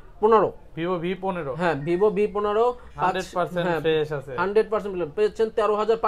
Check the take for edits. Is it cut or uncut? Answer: uncut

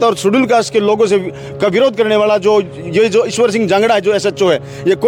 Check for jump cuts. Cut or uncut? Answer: uncut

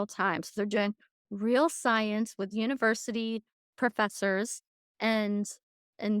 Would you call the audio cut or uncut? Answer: cut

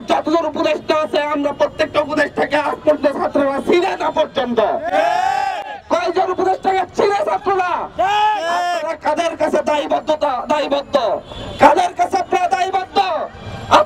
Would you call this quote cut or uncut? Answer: uncut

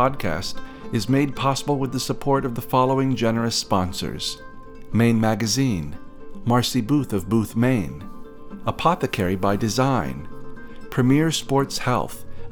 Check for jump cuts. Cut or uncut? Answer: uncut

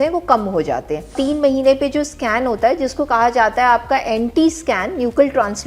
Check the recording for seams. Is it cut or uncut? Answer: cut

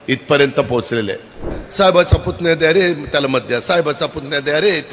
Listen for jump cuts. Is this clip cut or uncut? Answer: cut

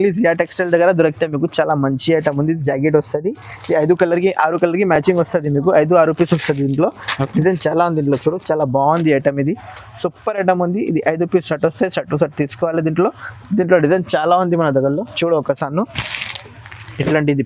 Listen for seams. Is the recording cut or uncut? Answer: uncut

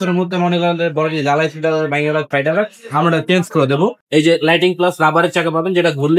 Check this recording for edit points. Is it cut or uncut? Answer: cut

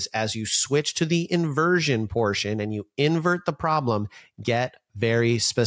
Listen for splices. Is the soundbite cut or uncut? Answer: uncut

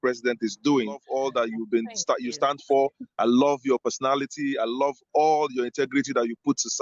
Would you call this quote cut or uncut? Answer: cut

